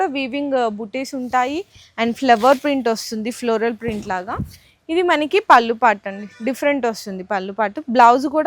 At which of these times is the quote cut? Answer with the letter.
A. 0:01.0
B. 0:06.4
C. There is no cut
C